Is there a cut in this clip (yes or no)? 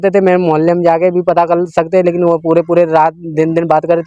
no